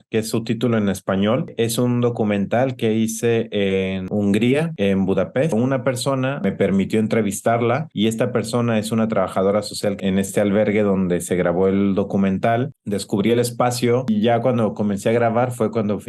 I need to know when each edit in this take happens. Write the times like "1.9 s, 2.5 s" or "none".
5.5 s, 14.1 s